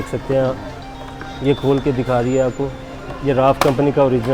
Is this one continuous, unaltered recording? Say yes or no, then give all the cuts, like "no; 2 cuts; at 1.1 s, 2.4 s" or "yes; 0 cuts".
yes; 0 cuts